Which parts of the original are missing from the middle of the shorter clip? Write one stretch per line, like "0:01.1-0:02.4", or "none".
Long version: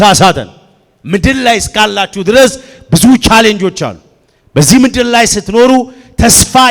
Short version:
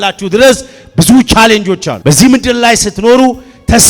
0:03.8-0:04.4